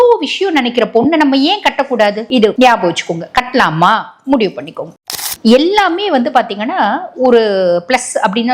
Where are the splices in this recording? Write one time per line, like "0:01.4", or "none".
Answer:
0:05.0